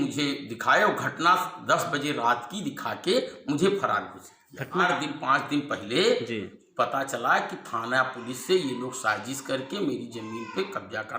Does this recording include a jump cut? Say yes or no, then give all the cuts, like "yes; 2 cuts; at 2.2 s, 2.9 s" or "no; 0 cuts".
yes; 1 cut; at 4.8 s